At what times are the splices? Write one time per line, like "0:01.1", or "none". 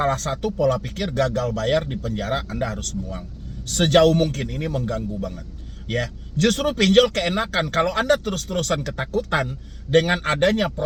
none